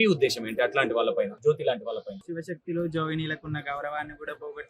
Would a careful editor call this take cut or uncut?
cut